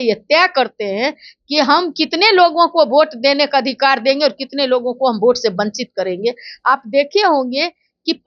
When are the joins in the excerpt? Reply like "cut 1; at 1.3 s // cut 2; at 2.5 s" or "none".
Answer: none